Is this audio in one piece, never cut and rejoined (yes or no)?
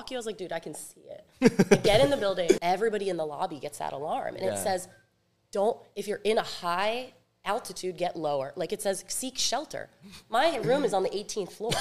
no